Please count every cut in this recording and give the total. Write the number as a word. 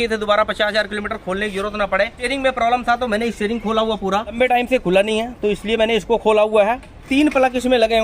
three